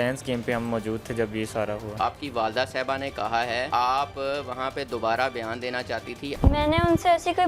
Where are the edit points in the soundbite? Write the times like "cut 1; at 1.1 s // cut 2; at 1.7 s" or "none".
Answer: cut 1; at 2.0 s // cut 2; at 3.7 s // cut 3; at 6.3 s